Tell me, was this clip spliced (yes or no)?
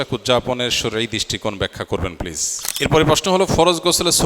yes